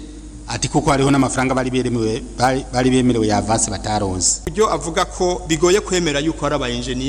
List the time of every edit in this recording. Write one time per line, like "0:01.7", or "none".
0:04.5